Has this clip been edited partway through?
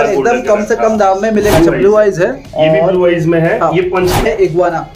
yes; 2 cuts; at 1.5 s, 4.3 s

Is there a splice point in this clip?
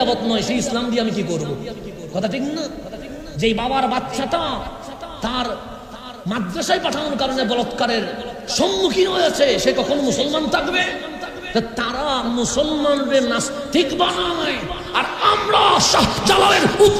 no; 0 cuts

